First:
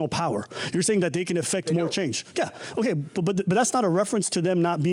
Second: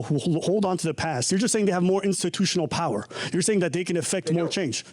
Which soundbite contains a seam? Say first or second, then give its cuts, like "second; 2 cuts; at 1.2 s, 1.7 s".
second; 1 cut; at 1.2 s